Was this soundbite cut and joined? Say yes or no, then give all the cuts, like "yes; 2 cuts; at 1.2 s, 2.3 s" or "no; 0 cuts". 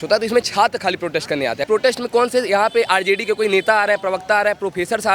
yes; 1 cut; at 1.6 s